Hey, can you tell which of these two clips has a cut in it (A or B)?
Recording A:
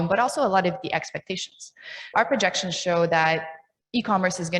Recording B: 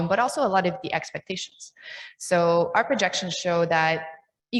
A